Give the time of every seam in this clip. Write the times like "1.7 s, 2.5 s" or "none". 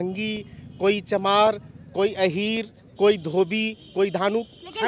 none

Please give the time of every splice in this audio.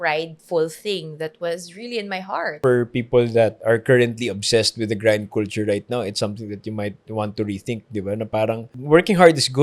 2.6 s, 3.6 s, 8.7 s

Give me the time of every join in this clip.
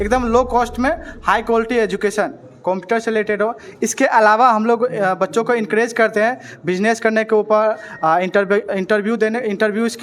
none

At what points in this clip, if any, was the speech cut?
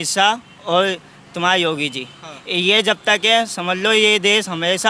none

